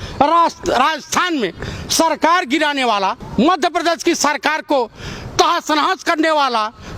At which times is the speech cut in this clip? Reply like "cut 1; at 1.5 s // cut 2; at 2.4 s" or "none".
cut 1; at 3.2 s